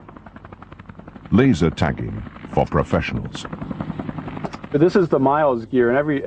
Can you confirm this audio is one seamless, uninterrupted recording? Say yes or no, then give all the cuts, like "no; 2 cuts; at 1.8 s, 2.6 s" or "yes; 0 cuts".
no; 1 cut; at 2.0 s